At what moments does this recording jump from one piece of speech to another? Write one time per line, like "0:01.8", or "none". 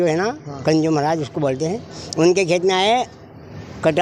none